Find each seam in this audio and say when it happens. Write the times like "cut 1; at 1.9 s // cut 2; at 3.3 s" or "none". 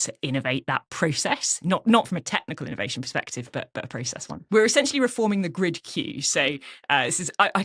cut 1; at 4.5 s